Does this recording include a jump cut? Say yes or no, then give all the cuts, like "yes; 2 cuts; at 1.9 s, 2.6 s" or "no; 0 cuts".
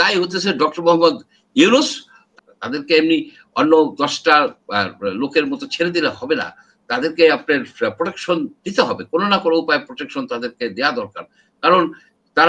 yes; 1 cut; at 2.3 s